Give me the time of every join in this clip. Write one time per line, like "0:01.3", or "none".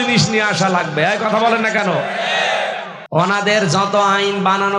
0:02.9